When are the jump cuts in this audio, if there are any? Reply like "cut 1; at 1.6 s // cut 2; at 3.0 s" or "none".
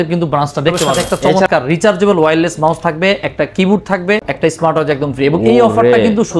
cut 1; at 1.0 s // cut 2; at 4.3 s

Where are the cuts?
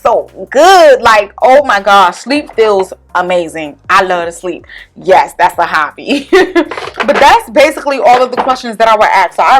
none

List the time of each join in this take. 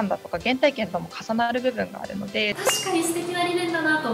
cut 1; at 2.6 s

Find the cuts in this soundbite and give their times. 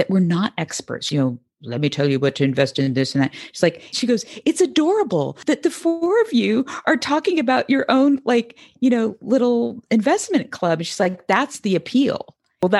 cut 1; at 1.0 s // cut 2; at 3.9 s // cut 3; at 5.3 s

